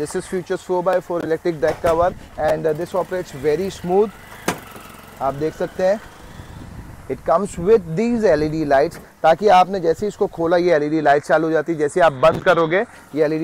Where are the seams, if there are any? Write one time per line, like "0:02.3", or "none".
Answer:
none